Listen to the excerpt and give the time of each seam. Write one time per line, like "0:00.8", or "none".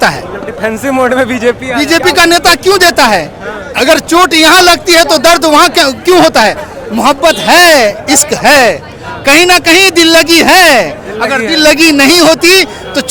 none